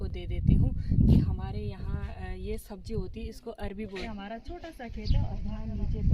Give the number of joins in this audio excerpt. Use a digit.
1